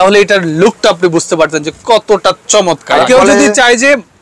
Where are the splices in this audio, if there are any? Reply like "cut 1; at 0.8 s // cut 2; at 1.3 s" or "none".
cut 1; at 3.1 s